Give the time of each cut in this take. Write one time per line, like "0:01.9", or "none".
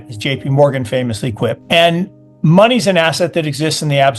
0:01.6